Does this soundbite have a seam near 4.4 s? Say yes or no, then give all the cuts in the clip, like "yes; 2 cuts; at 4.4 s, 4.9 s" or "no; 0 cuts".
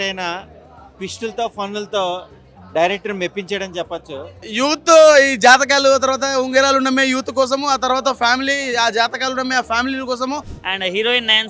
yes; 2 cuts; at 4.4 s, 10.6 s